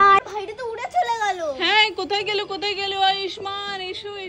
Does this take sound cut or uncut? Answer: uncut